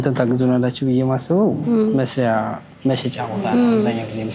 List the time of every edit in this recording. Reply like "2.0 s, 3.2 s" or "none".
none